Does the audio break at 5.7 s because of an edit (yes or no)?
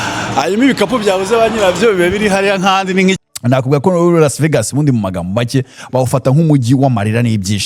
no